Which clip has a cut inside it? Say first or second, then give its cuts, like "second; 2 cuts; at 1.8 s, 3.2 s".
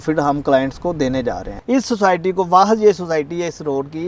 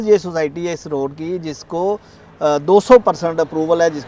first; 1 cut; at 1.5 s